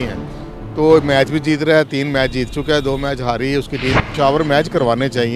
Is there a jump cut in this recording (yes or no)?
yes